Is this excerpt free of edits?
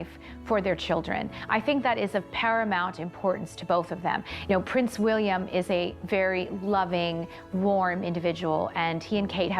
no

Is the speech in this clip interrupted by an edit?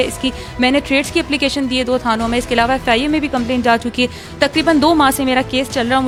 no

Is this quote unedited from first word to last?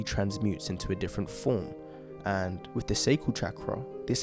no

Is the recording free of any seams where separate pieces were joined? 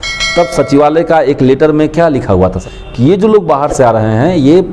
no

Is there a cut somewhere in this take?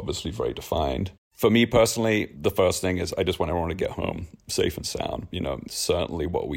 yes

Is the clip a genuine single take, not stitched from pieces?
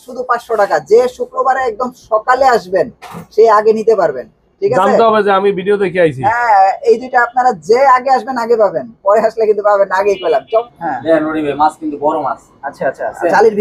no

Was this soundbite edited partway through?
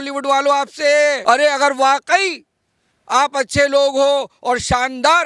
yes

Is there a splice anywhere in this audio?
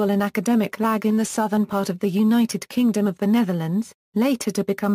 yes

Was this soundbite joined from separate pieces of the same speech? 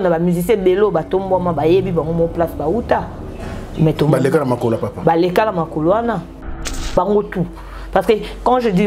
yes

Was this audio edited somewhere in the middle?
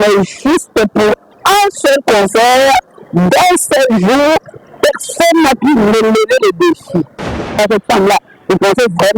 yes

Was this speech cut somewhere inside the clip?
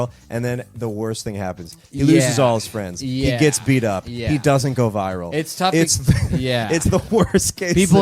no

